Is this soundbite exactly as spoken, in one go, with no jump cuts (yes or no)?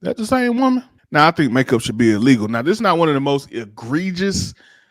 no